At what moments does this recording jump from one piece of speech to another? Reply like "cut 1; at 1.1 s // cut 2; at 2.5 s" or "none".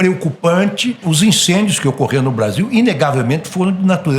cut 1; at 1.0 s